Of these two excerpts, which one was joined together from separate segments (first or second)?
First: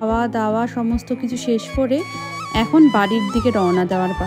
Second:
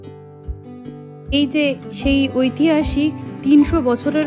second